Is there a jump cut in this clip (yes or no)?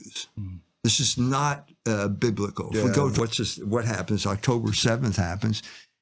yes